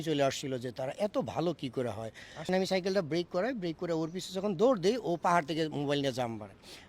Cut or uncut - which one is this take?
cut